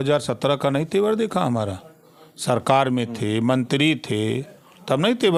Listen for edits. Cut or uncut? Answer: uncut